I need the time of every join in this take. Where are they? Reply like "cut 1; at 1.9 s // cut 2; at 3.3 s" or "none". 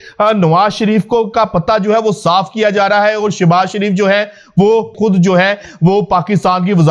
cut 1; at 4.9 s